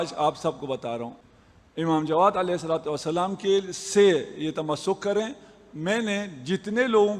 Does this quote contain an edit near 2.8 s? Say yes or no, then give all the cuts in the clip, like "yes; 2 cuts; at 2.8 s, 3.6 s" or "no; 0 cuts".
no; 1 cut; at 1.2 s